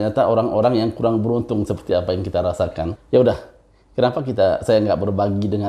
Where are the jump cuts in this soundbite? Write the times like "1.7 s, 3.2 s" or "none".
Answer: 2.9 s